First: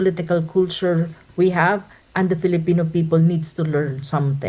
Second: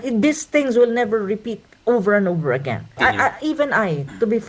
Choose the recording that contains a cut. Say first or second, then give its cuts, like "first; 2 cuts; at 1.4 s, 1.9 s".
second; 1 cut; at 3.0 s